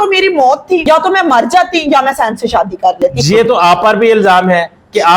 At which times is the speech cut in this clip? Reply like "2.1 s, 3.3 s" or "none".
3.2 s

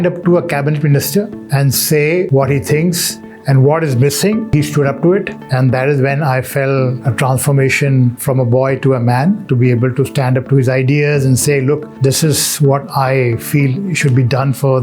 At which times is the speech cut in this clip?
2.3 s, 4.5 s

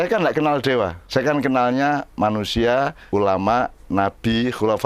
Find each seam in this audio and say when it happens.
1.0 s, 3.0 s

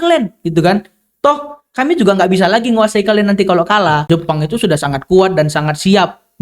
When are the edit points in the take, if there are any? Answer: 4.0 s

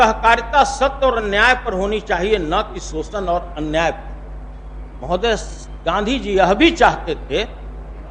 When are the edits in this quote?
none

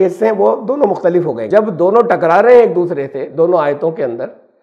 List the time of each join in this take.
1.4 s

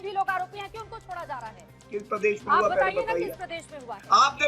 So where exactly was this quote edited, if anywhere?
1.7 s

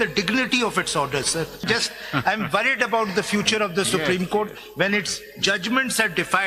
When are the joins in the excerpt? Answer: 1.6 s

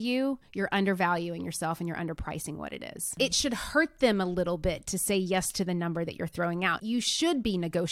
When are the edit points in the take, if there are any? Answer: 6.8 s

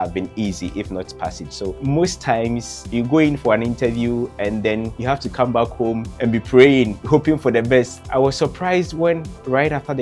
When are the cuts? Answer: 1.8 s, 2.7 s, 4.9 s, 6.1 s, 7.0 s, 8.0 s

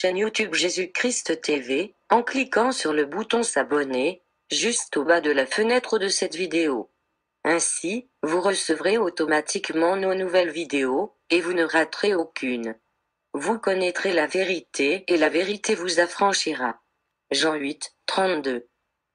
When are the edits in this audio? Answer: none

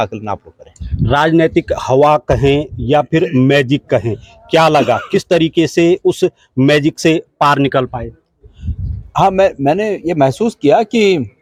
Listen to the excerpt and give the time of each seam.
none

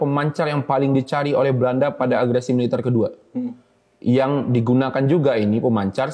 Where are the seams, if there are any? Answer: none

